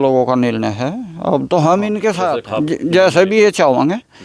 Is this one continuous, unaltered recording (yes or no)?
no